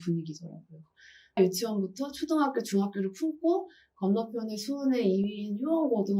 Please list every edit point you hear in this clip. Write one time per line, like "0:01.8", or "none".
0:01.4

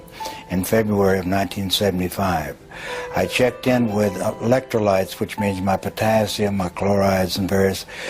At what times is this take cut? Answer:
0:03.1

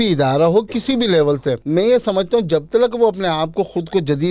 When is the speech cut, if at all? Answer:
0:01.6

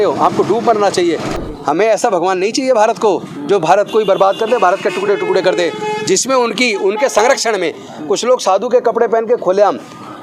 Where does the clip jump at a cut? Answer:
0:01.3

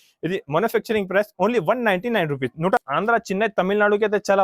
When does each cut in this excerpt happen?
0:02.8

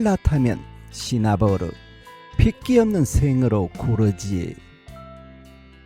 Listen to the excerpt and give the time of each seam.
0:04.6

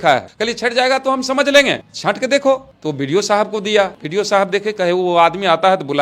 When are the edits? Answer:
0:04.0

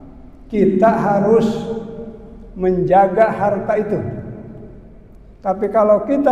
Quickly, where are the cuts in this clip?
none

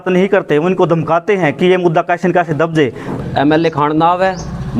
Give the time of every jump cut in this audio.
0:03.1

